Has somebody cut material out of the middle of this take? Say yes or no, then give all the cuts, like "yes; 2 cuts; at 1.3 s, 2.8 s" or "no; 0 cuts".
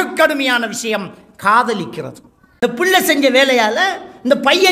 yes; 1 cut; at 2.4 s